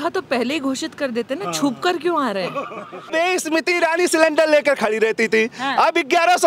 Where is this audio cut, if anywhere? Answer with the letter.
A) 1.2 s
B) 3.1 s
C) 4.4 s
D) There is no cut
B